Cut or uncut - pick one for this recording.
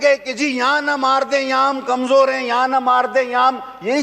uncut